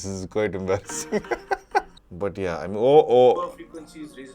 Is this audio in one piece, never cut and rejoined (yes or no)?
no